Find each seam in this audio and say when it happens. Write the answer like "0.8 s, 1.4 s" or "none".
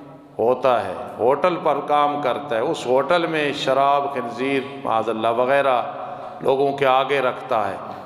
none